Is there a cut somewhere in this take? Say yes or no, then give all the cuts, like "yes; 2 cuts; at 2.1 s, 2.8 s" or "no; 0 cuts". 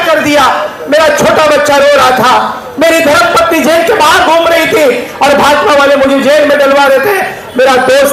no; 0 cuts